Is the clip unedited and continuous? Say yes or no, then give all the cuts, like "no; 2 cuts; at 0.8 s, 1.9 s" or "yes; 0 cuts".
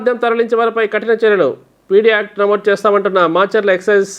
yes; 0 cuts